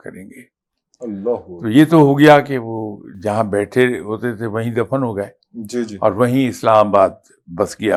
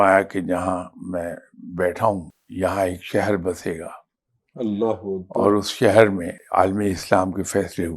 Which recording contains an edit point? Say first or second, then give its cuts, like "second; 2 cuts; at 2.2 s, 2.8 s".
second; 2 cuts; at 2.4 s, 6.4 s